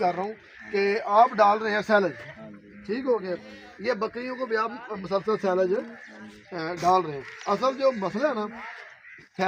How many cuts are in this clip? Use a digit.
0